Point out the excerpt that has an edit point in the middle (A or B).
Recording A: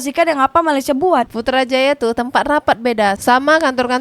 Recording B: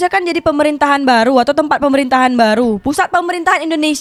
A